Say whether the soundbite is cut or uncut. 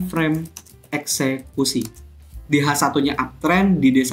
cut